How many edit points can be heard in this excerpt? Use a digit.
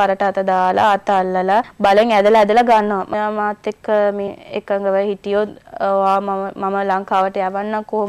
1